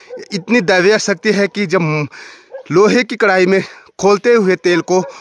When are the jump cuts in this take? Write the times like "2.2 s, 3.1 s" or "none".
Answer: none